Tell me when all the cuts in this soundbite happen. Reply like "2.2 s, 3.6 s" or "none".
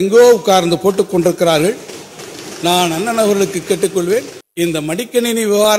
4.4 s